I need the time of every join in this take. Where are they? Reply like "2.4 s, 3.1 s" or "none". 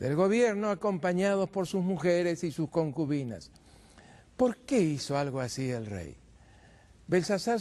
2.7 s

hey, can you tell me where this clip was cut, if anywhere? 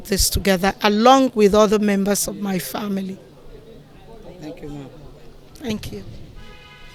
none

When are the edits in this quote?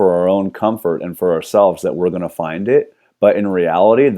3.0 s

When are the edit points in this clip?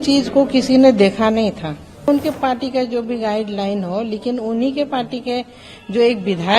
2.1 s

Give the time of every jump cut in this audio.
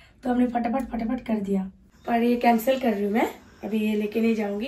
1.8 s

